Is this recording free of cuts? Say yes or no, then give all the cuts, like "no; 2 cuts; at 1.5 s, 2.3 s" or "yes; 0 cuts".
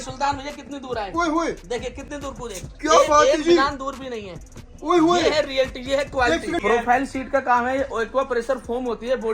no; 1 cut; at 6.6 s